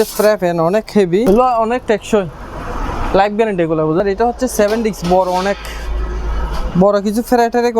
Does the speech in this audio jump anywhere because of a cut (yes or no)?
yes